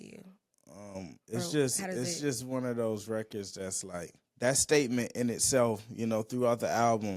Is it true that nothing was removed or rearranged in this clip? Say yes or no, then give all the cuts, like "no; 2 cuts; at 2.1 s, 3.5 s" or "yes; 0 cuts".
no; 1 cut; at 4.2 s